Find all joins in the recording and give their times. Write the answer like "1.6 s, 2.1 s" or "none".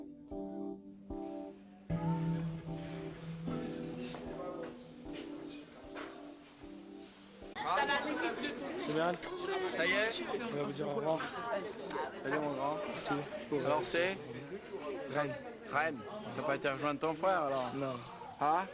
none